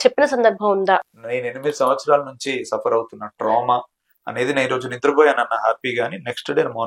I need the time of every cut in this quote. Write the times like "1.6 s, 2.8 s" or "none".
1.1 s